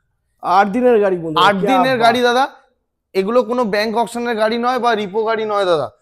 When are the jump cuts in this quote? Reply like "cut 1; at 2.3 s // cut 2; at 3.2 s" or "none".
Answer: none